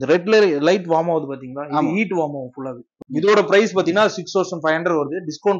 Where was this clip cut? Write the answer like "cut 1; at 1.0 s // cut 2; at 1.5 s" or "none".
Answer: cut 1; at 3.0 s